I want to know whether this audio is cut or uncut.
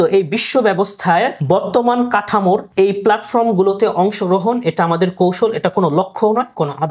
cut